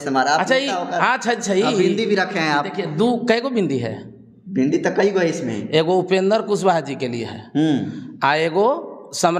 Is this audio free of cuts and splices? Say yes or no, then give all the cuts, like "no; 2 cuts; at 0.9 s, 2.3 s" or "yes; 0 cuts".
yes; 0 cuts